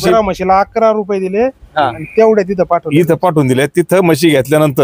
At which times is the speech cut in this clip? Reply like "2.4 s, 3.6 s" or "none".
none